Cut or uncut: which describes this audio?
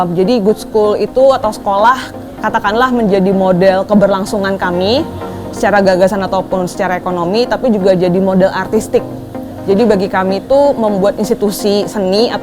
uncut